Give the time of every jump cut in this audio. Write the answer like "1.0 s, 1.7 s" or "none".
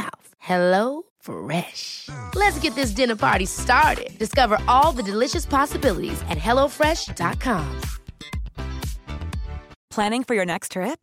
none